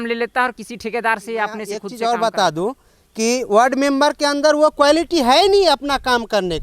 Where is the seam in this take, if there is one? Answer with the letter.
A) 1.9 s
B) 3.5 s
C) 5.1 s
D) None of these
A